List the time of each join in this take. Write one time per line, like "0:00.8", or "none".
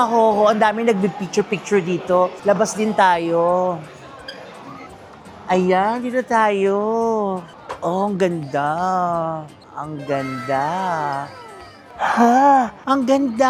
none